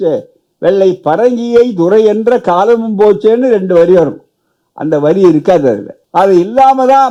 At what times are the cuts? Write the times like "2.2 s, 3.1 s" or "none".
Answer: none